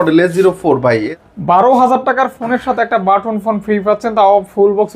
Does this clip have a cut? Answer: yes; 1 cut; at 1.1 s

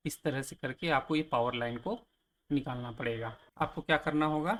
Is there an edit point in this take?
no; 0 cuts

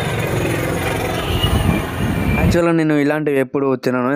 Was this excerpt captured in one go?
yes; 0 cuts

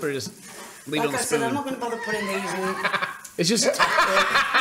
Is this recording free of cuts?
yes; 0 cuts

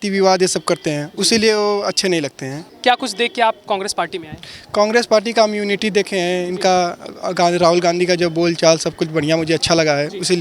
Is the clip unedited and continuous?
no; 1 cut; at 2.6 s

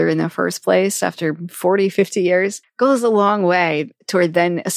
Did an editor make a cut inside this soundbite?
yes; 1 cut; at 2.6 s

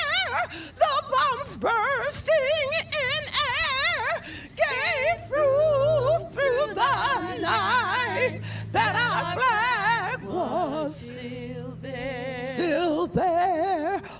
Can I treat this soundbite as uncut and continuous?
yes; 0 cuts

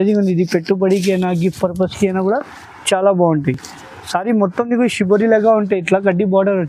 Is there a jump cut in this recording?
no; 0 cuts

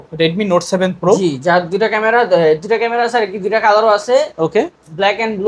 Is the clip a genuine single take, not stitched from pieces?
yes; 0 cuts

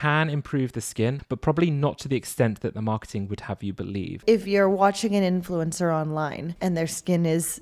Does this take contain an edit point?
yes; 3 cuts; at 1.2 s, 4.2 s, 6.5 s

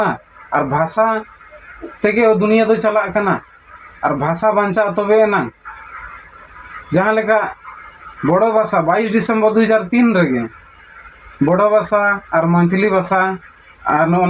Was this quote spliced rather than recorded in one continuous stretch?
no; 0 cuts

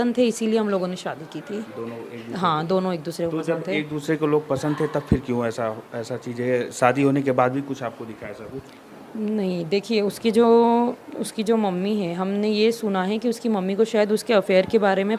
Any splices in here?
no; 0 cuts

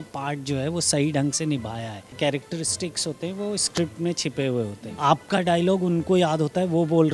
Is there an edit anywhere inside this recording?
yes; 2 cuts; at 2.0 s, 4.8 s

